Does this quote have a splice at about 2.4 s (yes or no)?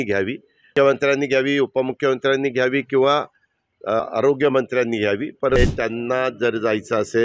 no